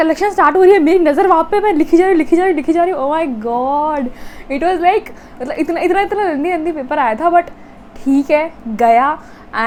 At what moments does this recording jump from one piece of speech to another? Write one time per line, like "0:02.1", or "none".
none